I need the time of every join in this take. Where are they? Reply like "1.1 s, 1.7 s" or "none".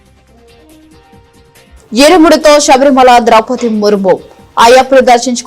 none